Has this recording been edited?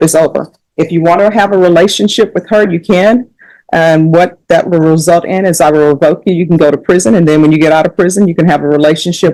no; 0 cuts

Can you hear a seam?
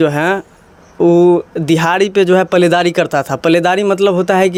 no; 0 cuts

